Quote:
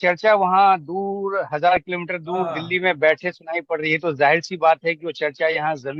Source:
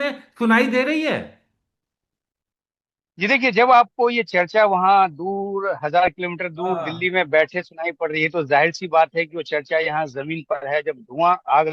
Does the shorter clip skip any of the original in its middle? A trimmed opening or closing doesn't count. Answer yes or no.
no